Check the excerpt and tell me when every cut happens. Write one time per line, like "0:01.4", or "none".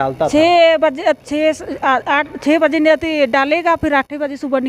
none